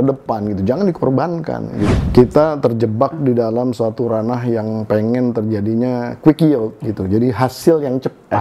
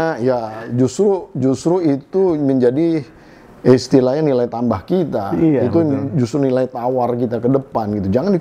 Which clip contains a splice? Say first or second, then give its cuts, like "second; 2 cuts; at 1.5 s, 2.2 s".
first; 1 cut; at 1.9 s